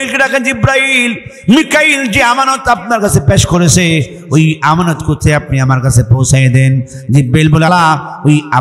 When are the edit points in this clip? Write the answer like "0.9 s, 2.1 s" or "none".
7.7 s